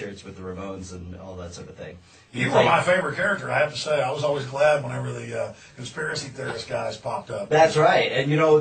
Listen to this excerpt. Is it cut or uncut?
cut